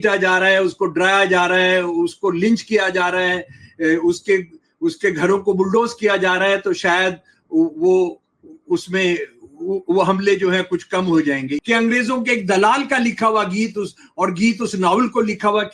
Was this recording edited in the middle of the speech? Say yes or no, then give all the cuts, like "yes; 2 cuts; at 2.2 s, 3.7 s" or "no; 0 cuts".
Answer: yes; 1 cut; at 11.5 s